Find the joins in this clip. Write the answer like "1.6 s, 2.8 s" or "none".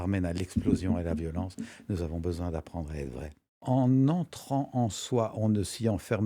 3.5 s

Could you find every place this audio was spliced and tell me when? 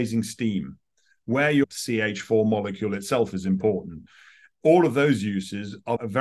1.7 s

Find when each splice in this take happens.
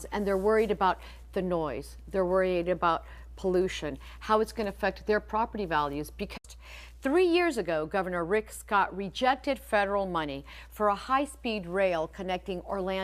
none

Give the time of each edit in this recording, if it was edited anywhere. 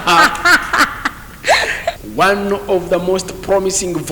2.0 s

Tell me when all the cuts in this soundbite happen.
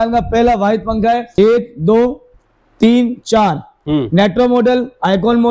1.3 s

